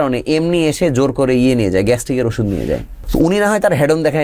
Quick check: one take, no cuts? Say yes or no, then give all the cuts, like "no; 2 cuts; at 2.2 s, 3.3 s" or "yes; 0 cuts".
no; 1 cut; at 2.9 s